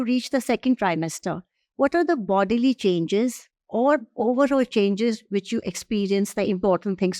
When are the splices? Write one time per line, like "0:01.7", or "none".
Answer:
none